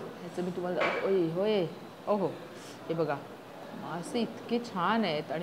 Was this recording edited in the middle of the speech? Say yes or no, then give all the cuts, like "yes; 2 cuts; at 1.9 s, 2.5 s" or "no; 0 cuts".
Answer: yes; 1 cut; at 3.6 s